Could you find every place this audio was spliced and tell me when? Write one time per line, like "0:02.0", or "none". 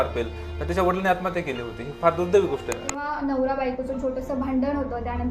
0:03.0